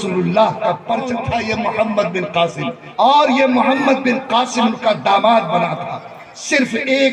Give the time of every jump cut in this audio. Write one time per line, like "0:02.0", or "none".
0:01.2
0:02.7